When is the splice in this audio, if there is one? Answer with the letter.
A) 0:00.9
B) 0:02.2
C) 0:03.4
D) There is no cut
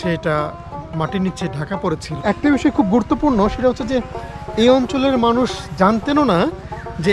B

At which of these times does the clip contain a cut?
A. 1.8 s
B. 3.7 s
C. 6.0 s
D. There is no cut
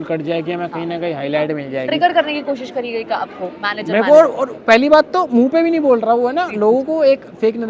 D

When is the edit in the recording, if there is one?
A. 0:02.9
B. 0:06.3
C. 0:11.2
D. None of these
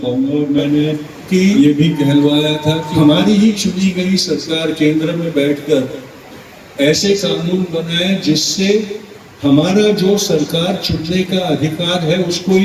A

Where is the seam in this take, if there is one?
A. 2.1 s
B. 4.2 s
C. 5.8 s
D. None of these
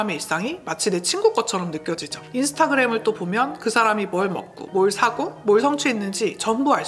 A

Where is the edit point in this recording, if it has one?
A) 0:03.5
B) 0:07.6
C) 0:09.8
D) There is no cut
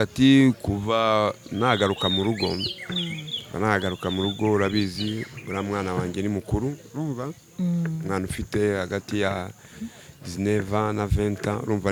D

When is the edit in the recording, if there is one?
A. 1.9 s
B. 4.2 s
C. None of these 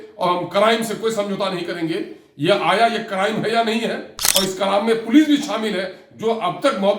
B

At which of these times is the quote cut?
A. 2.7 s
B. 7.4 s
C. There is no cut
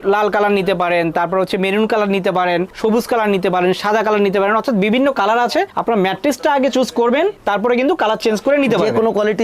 B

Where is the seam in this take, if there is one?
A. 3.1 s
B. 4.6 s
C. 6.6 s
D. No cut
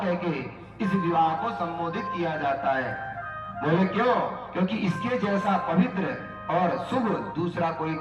D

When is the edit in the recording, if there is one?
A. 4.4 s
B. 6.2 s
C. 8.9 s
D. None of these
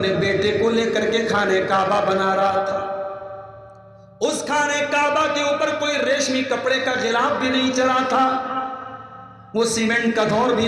D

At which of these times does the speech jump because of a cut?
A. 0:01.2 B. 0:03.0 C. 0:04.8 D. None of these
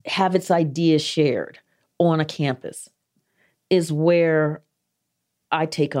B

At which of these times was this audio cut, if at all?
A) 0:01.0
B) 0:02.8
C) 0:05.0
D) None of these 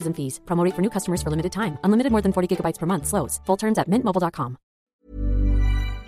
C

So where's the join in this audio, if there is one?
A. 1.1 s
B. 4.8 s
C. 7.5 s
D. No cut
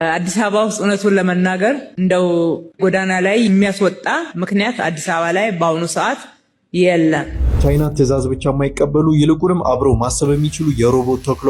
C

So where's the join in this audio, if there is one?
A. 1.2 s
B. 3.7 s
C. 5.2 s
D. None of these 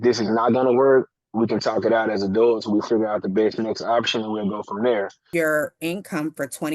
C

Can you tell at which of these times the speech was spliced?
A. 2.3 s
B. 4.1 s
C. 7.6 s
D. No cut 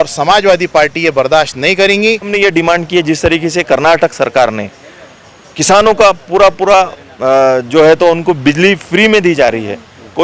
A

